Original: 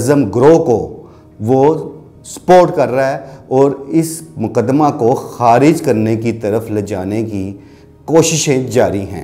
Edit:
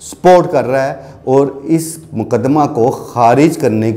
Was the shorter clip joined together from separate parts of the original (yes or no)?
no